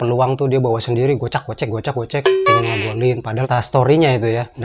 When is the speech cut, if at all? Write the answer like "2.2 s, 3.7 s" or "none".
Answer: 3.4 s